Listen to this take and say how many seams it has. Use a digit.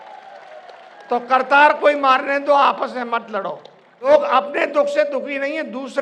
1